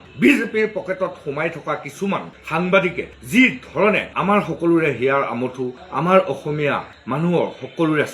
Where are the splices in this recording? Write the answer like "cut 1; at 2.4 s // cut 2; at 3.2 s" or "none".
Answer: none